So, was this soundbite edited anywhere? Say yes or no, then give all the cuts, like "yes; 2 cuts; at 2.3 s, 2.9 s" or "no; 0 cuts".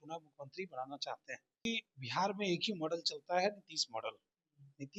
yes; 1 cut; at 1.6 s